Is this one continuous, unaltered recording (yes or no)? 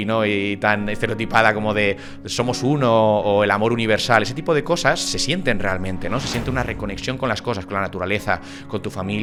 yes